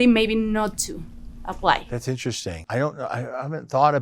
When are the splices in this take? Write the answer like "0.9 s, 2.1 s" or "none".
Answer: 2.7 s